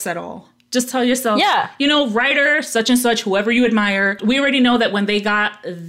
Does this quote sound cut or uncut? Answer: cut